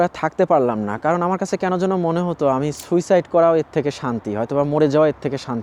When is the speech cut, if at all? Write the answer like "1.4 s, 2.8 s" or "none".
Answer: none